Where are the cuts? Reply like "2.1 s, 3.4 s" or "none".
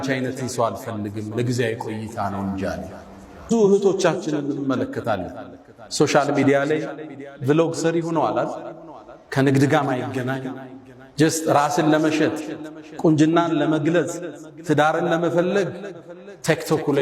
3.5 s